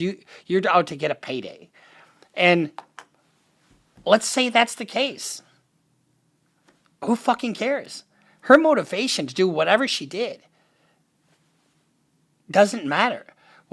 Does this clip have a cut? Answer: no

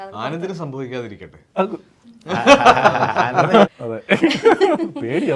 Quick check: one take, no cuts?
yes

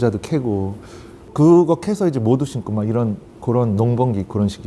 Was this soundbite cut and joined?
yes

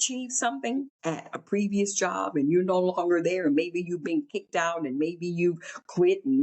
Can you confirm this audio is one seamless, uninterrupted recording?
no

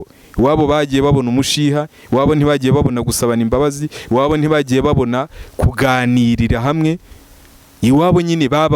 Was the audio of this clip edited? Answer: no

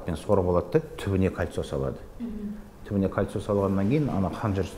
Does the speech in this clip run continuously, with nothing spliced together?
yes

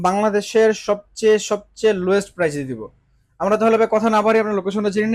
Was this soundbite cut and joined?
no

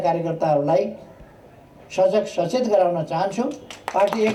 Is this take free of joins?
yes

